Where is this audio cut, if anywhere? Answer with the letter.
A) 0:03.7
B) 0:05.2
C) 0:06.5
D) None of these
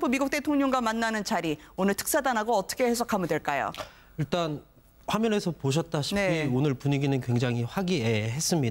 D